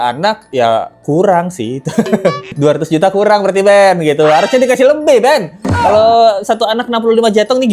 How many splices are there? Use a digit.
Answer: 1